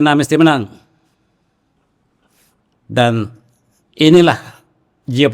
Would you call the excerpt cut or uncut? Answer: uncut